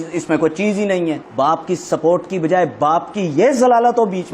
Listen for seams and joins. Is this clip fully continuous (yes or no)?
no